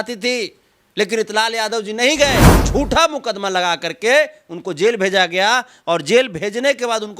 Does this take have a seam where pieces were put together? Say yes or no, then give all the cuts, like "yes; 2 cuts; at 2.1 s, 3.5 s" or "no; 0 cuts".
yes; 1 cut; at 2.6 s